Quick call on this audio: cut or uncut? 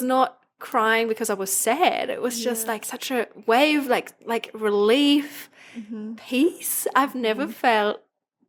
uncut